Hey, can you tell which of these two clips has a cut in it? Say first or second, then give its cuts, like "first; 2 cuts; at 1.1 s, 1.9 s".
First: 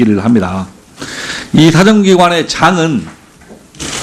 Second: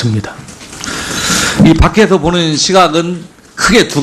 second; 1 cut; at 2.4 s